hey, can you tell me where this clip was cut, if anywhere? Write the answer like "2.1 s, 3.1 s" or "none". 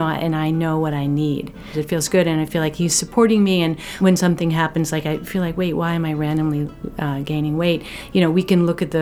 1.7 s, 3.8 s